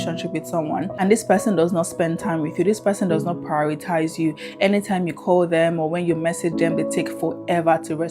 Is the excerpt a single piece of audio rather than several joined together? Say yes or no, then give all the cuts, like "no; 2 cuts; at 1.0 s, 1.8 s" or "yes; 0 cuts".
no; 1 cut; at 0.9 s